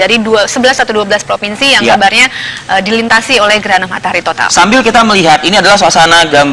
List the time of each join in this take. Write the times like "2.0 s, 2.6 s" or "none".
4.6 s